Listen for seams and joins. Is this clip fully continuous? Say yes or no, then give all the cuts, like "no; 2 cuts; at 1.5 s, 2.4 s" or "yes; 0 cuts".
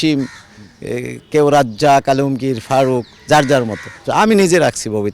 no; 1 cut; at 4.0 s